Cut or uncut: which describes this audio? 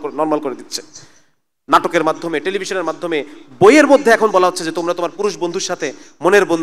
uncut